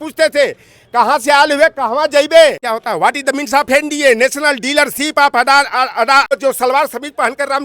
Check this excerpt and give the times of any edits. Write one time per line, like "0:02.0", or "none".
0:02.7
0:06.3